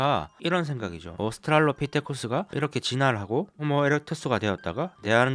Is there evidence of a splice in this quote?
yes; 1 cut; at 2.5 s

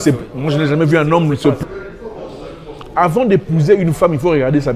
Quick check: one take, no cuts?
no; 1 cut; at 1.6 s

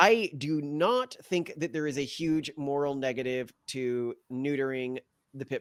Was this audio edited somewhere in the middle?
no; 0 cuts

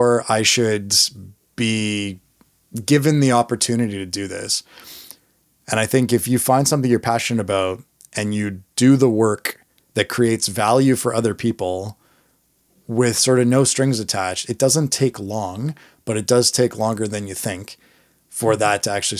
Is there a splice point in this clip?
no; 0 cuts

